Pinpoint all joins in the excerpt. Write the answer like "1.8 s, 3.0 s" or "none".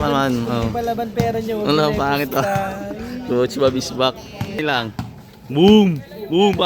4.6 s